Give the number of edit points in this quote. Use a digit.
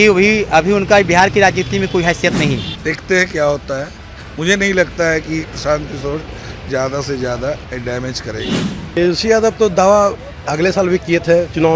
2